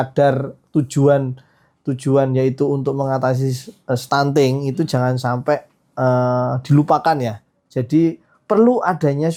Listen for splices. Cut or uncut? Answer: uncut